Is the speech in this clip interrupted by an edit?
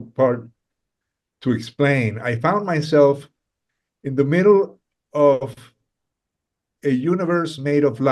no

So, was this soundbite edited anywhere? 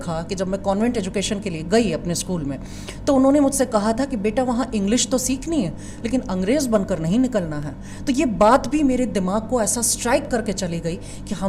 no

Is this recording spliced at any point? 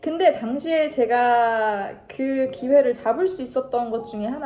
no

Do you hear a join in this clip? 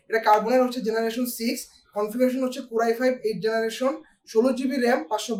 no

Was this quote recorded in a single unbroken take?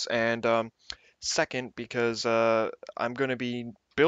no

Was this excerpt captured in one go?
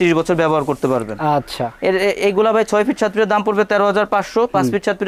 yes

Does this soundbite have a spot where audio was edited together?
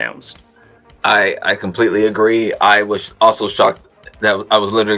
no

